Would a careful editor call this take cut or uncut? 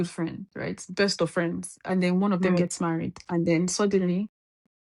uncut